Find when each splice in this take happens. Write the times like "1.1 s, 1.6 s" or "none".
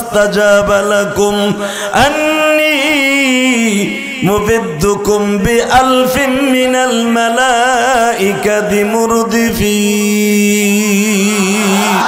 none